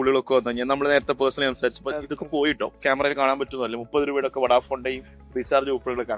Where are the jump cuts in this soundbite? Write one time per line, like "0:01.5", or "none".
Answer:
0:02.8